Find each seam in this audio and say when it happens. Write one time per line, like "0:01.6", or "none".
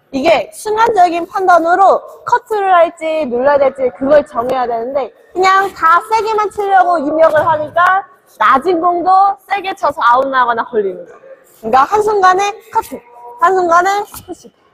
none